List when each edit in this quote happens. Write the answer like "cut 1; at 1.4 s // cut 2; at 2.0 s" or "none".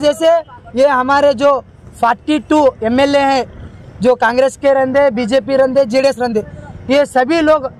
none